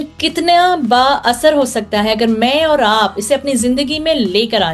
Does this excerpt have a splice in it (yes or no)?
no